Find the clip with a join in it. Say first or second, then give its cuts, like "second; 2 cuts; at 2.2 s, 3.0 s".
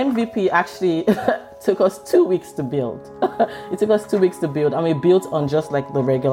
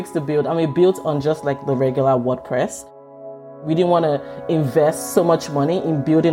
second; 1 cut; at 3.1 s